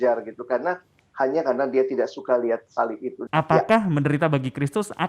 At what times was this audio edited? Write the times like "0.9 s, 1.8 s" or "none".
3.1 s